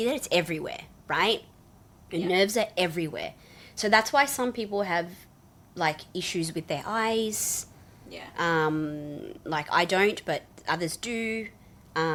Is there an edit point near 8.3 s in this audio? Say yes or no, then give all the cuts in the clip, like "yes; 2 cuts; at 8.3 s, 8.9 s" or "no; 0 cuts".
no; 0 cuts